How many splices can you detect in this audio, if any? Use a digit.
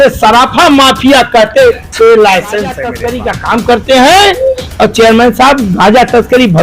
1